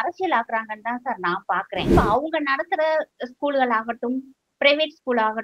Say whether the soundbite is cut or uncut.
cut